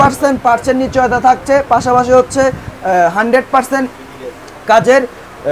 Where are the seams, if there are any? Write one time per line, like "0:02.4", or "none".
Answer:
none